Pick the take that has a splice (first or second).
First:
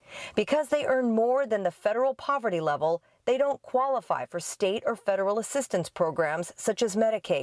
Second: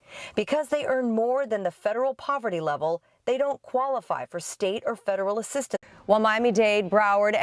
first